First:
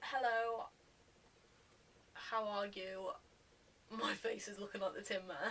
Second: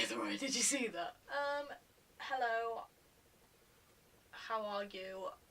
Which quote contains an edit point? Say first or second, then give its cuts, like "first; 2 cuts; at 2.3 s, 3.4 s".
second; 1 cut; at 1.2 s